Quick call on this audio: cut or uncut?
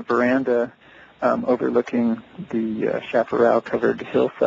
cut